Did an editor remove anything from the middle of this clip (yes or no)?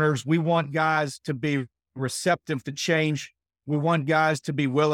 no